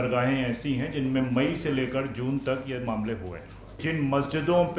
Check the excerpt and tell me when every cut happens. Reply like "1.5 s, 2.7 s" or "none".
3.8 s

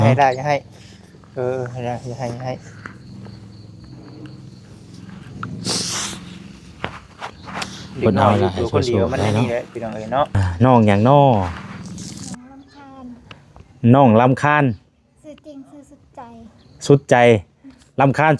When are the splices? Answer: 10.5 s

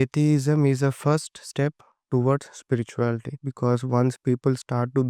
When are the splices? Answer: none

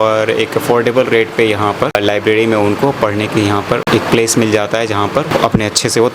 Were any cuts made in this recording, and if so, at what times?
2.0 s, 3.8 s, 5.3 s

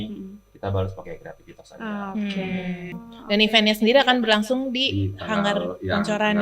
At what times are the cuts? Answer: 2.9 s

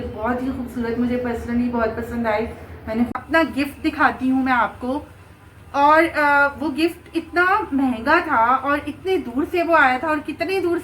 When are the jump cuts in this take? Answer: 3.1 s

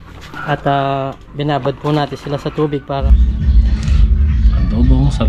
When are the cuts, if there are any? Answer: 3.0 s

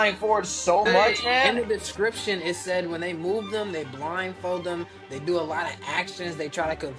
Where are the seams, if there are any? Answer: 1.5 s

